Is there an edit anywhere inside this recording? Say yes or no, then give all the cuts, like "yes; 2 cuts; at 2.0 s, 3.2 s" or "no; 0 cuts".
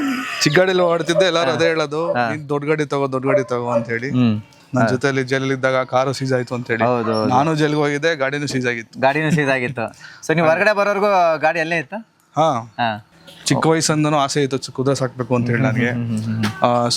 yes; 2 cuts; at 4.6 s, 13.1 s